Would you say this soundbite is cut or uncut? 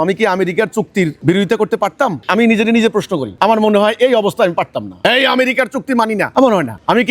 cut